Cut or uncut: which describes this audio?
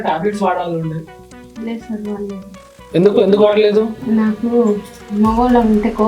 uncut